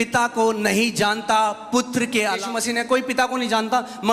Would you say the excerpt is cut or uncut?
cut